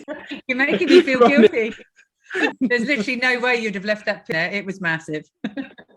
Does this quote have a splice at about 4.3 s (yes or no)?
yes